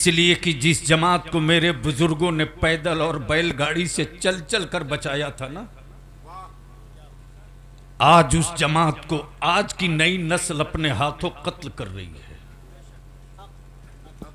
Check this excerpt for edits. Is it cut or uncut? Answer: uncut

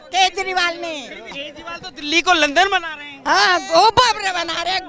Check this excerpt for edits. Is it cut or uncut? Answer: cut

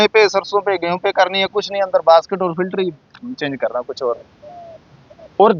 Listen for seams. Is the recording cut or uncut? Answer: uncut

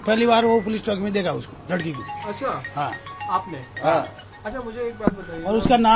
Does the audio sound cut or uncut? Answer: uncut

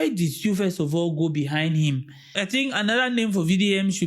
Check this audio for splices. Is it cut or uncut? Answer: cut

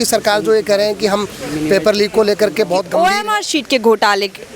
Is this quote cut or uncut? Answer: cut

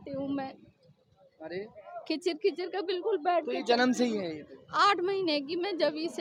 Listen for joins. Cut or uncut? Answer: uncut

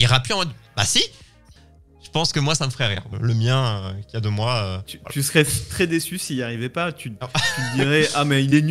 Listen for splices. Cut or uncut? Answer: cut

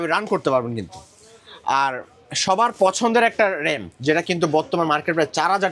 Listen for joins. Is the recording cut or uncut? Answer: uncut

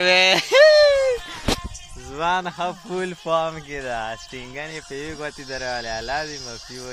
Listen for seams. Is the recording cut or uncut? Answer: uncut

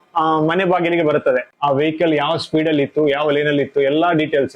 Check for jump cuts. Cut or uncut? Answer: cut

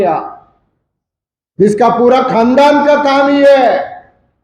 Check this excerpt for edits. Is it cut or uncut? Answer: uncut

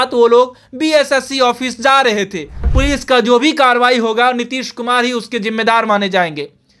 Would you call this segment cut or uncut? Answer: cut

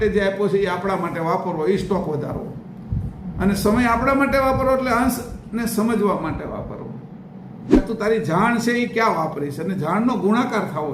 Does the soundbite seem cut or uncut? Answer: cut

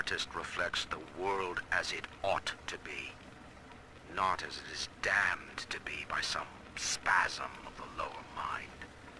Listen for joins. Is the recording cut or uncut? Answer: cut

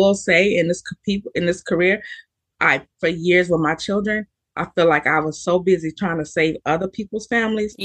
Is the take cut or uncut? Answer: uncut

